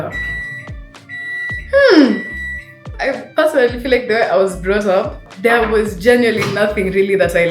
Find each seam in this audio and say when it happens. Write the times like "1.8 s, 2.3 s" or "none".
2.9 s, 5.2 s